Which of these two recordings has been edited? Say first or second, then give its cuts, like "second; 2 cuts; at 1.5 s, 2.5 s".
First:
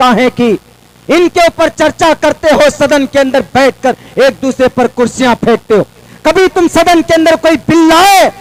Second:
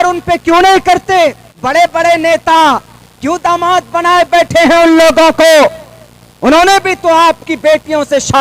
second; 1 cut; at 1.5 s